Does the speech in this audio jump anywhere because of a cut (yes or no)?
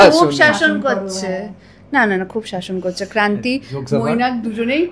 no